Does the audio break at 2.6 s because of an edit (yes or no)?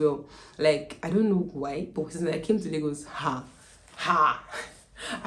no